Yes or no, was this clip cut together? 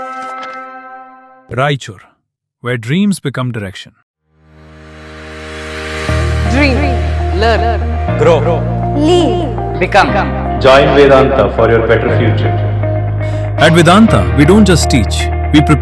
no